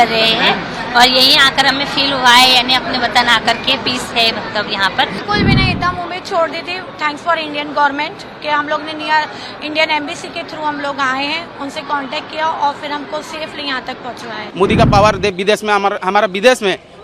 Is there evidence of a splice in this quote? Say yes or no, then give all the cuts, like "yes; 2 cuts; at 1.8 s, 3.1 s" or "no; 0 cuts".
yes; 2 cuts; at 5.2 s, 14.4 s